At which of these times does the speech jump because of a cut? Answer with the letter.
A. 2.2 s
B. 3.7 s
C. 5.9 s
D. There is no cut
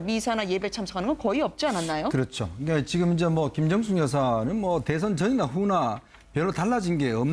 D